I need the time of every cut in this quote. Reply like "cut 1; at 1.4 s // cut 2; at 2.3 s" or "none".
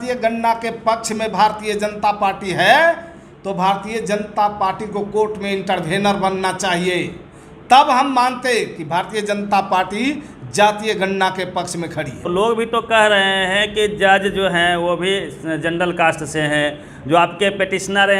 cut 1; at 12.3 s